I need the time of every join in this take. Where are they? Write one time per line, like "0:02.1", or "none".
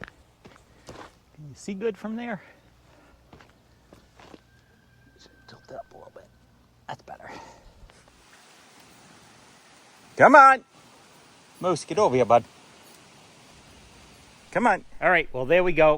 0:08.2
0:14.9